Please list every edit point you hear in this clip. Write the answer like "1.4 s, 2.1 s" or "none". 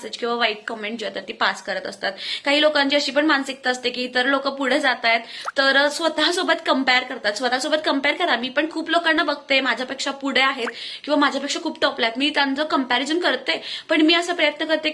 none